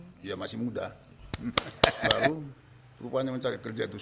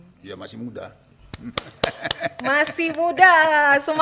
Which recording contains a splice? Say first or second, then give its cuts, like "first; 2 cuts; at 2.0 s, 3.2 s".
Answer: first; 1 cut; at 2.3 s